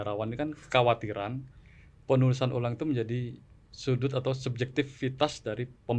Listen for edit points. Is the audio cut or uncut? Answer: uncut